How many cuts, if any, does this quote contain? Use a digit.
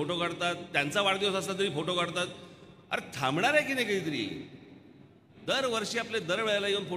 1